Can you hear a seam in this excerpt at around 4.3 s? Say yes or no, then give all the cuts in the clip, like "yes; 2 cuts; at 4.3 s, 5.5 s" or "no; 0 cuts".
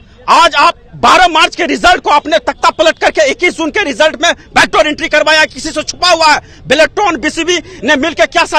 no; 0 cuts